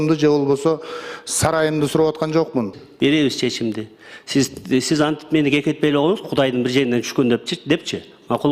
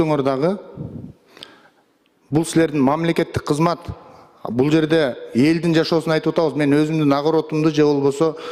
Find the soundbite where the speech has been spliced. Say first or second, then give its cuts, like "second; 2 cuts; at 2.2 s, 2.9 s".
first; 1 cut; at 2.8 s